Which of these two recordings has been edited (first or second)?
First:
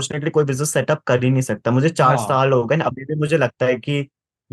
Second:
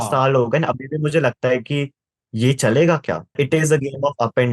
second